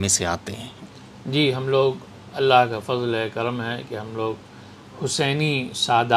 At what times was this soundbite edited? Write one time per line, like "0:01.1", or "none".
none